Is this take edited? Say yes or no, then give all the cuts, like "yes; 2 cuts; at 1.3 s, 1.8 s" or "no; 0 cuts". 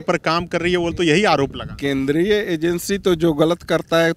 no; 0 cuts